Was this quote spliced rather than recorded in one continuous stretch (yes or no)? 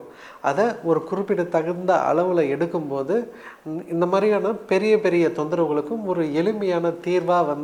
no